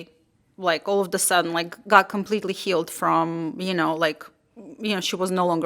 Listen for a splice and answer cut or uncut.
uncut